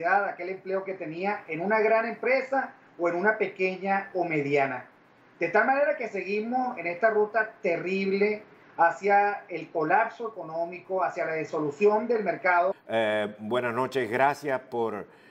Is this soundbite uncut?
yes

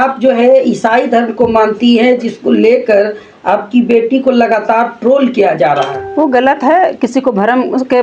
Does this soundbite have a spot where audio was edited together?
no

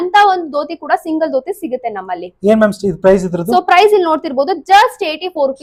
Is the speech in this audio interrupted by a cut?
no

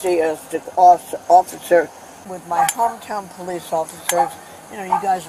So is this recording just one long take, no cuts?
no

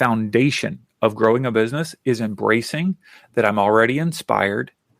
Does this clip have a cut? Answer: no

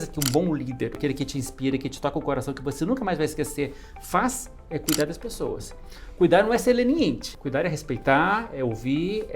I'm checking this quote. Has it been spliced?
yes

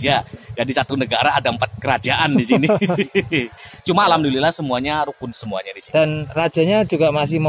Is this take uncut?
yes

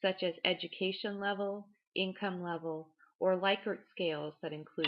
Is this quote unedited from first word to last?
no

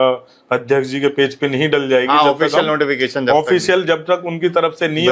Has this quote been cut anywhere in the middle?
no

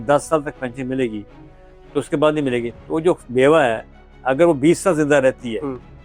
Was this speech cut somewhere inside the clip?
no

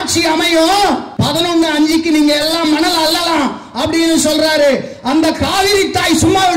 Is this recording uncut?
no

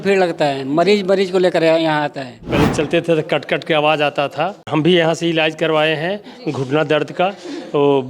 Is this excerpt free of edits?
no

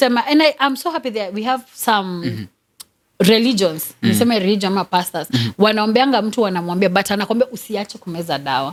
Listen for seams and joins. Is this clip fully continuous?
yes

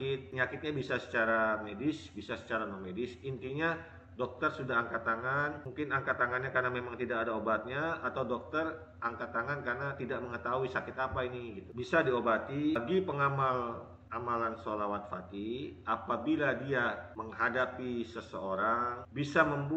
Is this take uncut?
no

